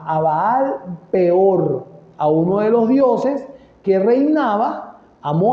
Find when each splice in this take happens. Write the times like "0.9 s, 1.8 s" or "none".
3.8 s